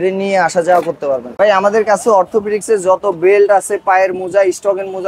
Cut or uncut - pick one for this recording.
cut